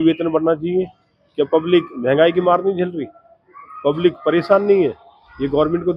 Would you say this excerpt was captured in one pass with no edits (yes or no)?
yes